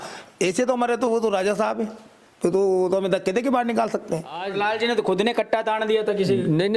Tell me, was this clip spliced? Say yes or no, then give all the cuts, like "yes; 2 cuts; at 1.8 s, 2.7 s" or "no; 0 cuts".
yes; 1 cut; at 4.4 s